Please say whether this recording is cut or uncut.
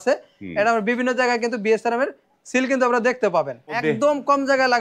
cut